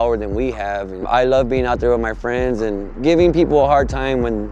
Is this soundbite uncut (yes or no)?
no